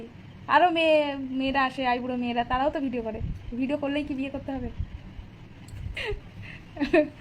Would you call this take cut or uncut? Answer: uncut